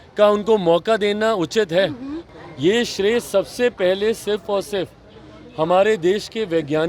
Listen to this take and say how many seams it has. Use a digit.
1